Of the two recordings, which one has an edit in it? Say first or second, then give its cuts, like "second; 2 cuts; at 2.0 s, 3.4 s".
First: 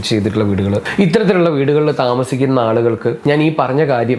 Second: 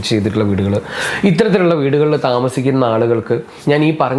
first; 2 cuts; at 0.9 s, 3.2 s